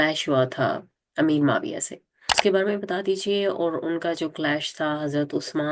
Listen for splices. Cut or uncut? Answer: cut